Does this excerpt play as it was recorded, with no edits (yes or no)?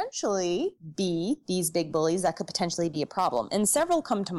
yes